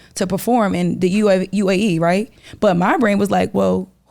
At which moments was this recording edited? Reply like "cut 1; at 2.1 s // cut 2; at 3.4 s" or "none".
cut 1; at 2.4 s